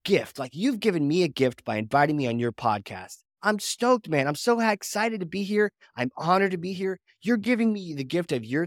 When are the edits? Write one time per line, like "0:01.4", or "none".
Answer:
none